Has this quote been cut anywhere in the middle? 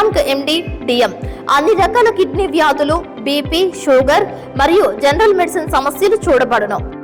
no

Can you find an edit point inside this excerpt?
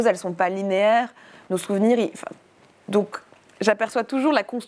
no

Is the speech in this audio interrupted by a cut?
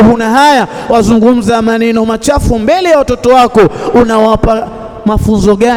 no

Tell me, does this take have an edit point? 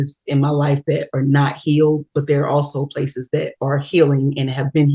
no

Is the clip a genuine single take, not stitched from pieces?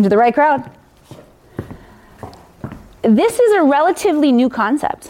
yes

